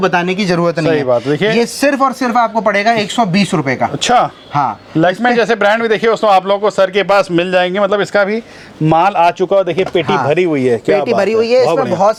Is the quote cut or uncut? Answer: uncut